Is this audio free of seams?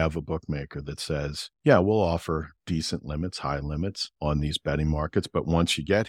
no; 3 cuts; at 1.4 s, 2.5 s, 4.1 s

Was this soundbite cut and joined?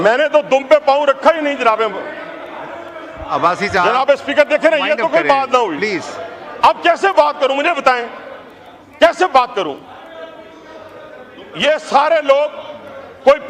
no; 0 cuts

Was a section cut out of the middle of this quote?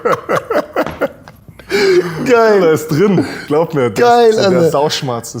no; 0 cuts

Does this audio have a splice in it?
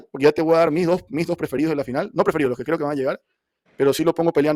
no; 0 cuts

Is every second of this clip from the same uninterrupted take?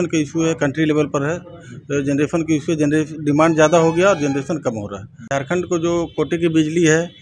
no; 1 cut; at 5.3 s

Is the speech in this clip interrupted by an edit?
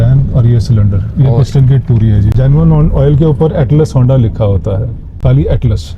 yes; 2 cuts; at 2.3 s, 5.1 s

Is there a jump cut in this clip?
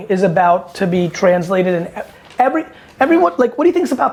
no; 0 cuts

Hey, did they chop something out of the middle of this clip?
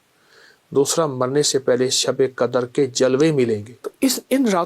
yes; 1 cut; at 3.7 s

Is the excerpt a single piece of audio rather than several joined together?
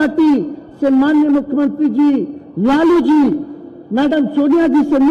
yes; 0 cuts

